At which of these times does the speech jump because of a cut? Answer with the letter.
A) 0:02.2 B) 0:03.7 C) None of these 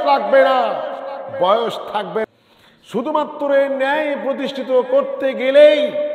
A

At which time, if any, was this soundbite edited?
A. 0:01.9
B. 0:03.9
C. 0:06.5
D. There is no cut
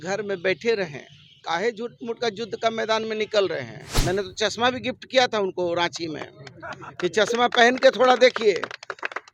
B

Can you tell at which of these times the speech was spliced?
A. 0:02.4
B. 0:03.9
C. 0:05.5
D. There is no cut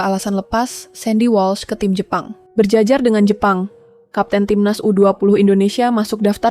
A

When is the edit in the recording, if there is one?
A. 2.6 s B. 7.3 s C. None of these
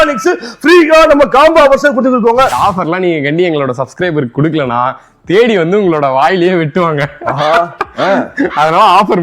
A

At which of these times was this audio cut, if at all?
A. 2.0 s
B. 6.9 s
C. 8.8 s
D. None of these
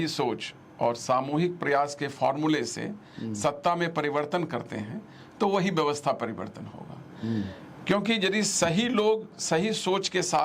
D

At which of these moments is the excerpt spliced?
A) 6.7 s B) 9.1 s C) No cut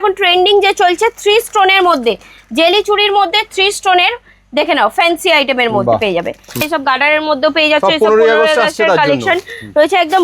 A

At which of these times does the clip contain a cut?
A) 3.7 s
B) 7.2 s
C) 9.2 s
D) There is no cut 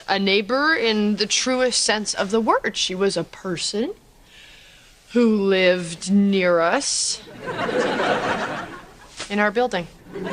A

